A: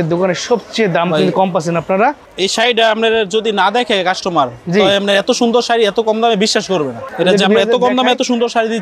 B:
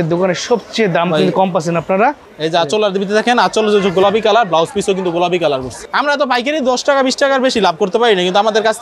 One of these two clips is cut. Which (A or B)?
B